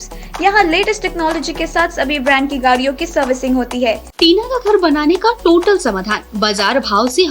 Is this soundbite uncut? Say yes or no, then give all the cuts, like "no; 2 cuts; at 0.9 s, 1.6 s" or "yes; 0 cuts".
no; 1 cut; at 4.1 s